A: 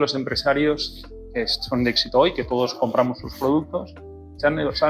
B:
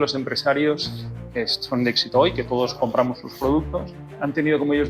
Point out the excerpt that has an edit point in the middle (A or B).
B